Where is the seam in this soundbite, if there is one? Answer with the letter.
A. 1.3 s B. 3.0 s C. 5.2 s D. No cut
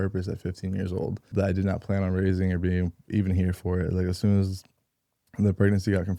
A